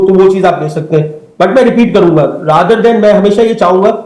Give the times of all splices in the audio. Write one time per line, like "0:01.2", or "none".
none

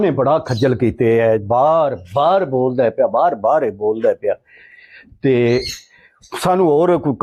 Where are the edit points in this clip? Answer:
none

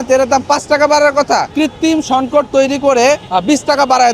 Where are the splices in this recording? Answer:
0:01.5
0:03.2

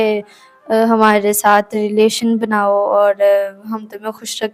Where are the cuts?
none

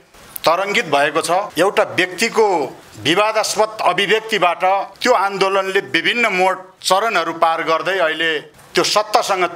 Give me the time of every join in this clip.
0:01.5
0:02.9
0:04.9
0:06.7
0:08.5

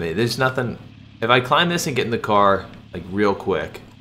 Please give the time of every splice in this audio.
none

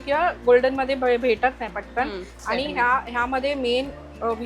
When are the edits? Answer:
0:02.3

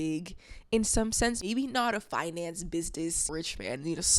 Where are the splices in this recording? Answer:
0:01.4
0:03.3

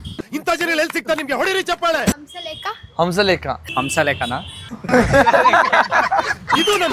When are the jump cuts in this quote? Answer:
0:04.7

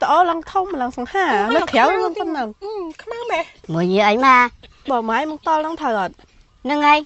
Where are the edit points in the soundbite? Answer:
0:03.6

